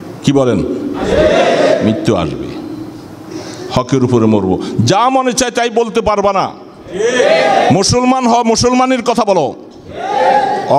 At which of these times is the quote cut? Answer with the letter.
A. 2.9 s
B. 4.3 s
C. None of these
C